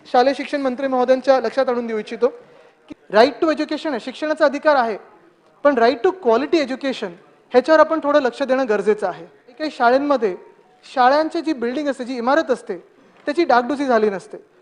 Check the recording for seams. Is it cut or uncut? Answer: cut